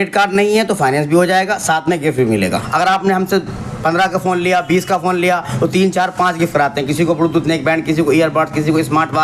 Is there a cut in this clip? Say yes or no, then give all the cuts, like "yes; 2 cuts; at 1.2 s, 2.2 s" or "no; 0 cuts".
yes; 1 cut; at 2.6 s